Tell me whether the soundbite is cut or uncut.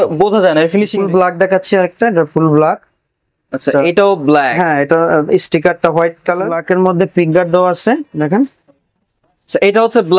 cut